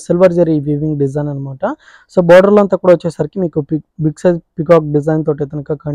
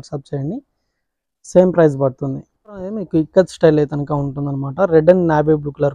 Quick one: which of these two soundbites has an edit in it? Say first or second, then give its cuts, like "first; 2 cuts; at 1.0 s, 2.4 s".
second; 1 cut; at 3.0 s